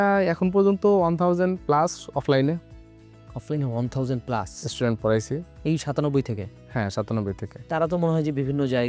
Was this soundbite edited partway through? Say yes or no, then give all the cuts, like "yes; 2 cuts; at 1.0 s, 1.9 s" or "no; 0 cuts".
no; 0 cuts